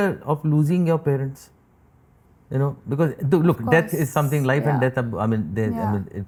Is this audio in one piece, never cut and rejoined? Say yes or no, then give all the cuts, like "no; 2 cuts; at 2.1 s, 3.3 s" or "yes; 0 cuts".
yes; 0 cuts